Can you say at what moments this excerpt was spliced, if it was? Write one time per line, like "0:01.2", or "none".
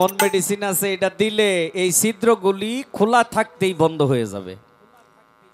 none